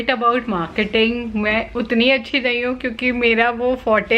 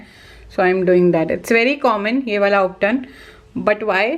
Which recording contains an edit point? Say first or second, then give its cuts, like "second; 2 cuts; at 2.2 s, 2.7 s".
first; 1 cut; at 1.7 s